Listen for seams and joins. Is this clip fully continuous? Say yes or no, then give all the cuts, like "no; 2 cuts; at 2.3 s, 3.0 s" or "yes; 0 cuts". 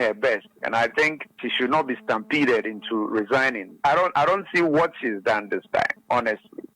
no; 2 cuts; at 1.5 s, 3.7 s